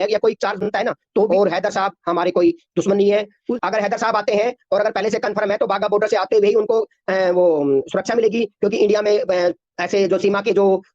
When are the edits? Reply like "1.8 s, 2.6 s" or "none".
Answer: 1.3 s, 3.4 s